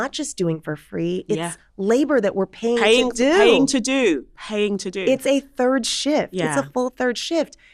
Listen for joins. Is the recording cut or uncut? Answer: uncut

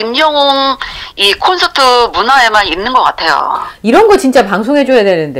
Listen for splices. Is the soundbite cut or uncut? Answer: uncut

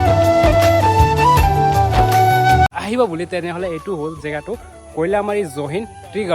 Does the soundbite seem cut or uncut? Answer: cut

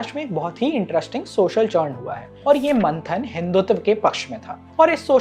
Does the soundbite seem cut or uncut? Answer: uncut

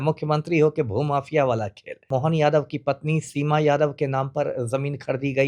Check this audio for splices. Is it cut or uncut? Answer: cut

